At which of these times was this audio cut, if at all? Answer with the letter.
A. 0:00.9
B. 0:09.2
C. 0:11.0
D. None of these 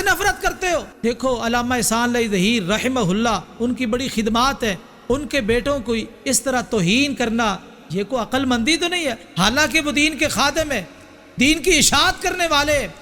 A